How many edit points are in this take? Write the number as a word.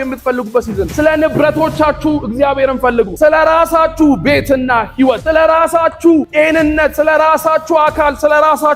one